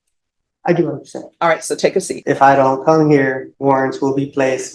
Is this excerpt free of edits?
no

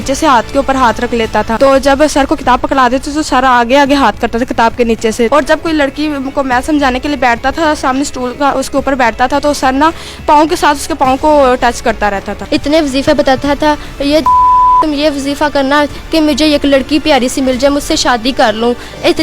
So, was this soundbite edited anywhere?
yes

